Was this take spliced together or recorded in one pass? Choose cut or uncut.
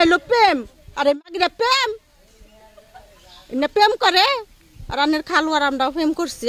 uncut